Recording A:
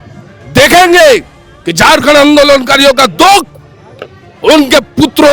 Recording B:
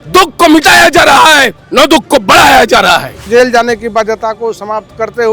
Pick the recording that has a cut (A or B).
B